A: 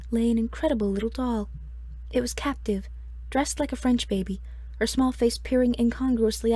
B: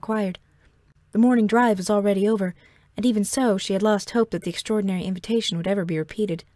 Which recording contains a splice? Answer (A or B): B